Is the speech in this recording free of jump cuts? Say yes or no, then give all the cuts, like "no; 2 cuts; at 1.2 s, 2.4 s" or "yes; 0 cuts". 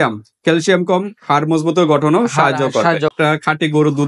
no; 1 cut; at 3.1 s